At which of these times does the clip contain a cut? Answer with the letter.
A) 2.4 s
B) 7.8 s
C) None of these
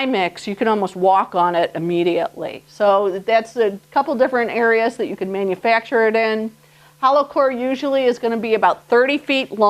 A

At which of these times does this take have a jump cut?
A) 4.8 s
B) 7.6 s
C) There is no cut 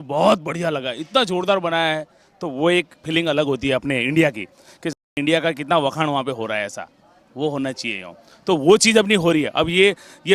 C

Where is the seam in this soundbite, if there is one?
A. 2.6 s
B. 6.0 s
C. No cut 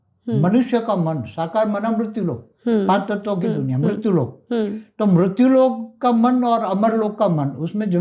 C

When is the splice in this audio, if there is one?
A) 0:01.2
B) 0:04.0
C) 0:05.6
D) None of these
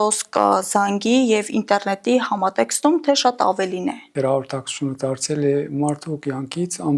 B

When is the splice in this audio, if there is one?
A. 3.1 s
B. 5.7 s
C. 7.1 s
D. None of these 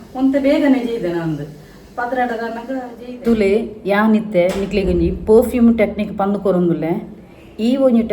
A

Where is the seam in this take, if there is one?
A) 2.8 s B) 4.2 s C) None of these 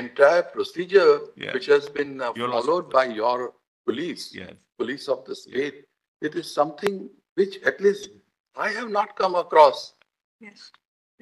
C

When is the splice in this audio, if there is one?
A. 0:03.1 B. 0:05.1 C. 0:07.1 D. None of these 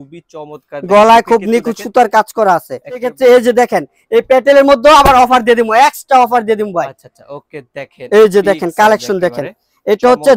A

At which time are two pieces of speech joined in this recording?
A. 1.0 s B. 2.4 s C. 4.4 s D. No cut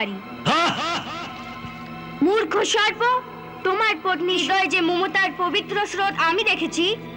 C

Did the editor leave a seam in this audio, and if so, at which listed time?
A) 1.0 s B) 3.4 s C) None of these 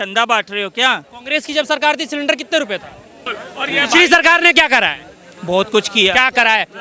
B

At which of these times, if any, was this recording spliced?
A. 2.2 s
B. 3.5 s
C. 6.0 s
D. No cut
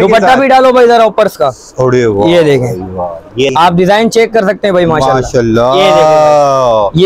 B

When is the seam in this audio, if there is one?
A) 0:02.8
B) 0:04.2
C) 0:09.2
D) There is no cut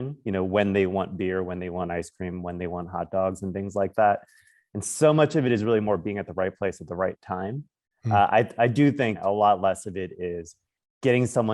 C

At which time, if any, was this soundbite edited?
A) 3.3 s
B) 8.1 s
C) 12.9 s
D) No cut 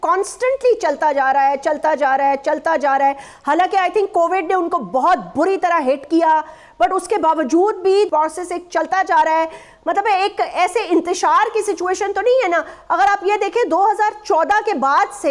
B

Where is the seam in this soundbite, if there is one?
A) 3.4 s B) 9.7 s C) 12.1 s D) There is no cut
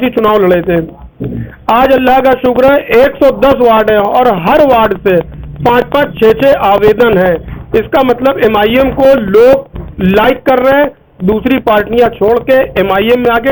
D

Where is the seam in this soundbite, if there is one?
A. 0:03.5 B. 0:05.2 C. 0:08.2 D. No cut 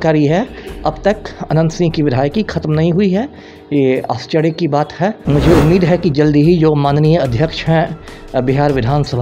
B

